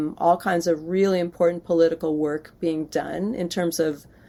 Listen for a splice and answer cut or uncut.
uncut